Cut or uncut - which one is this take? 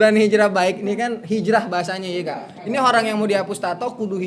uncut